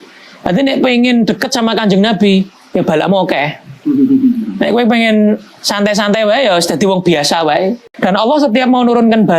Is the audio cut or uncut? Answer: cut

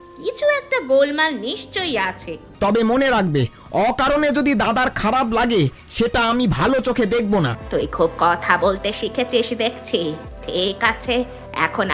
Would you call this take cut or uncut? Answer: cut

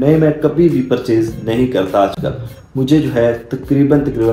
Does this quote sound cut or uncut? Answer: uncut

